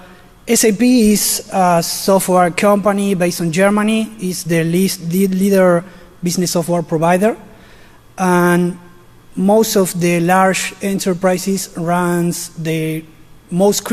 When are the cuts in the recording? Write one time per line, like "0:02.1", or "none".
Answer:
0:02.1